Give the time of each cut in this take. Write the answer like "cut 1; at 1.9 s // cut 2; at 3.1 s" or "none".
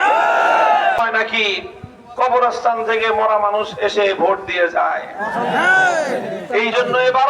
cut 1; at 1.0 s